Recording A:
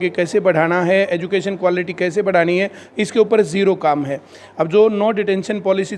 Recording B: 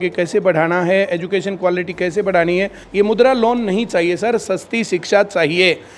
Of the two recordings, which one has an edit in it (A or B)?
B